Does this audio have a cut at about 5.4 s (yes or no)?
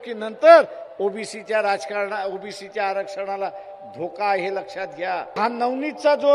yes